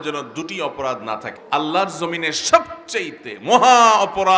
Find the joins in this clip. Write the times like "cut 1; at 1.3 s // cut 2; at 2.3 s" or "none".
cut 1; at 1.3 s